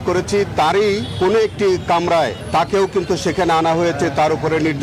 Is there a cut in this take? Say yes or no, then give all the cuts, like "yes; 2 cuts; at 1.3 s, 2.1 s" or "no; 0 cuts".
no; 0 cuts